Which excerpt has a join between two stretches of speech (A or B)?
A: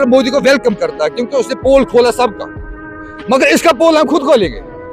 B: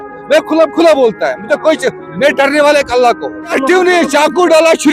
B